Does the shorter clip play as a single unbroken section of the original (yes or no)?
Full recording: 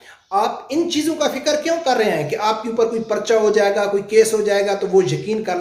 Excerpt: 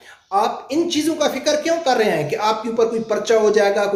yes